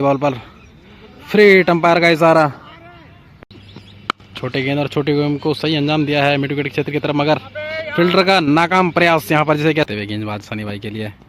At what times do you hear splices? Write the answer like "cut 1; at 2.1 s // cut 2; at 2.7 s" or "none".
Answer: cut 1; at 3.2 s // cut 2; at 9.9 s

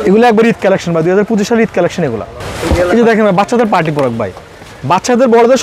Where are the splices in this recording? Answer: none

